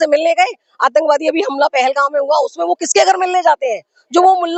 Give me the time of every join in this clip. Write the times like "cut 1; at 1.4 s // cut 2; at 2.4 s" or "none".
none